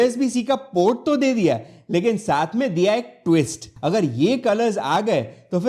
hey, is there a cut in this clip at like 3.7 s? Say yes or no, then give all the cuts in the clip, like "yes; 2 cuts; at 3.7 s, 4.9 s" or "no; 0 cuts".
yes; 1 cut; at 3.7 s